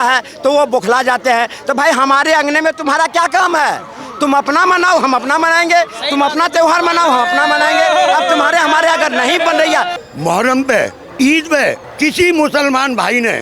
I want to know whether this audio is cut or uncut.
cut